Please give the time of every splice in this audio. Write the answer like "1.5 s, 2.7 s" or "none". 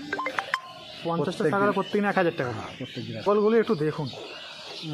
3.3 s